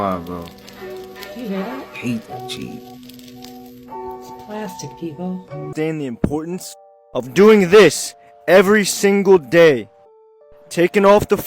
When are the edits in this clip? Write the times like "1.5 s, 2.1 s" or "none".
5.7 s